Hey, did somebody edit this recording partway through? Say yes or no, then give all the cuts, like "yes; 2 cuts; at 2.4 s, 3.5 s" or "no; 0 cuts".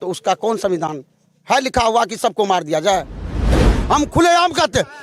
yes; 1 cut; at 3.6 s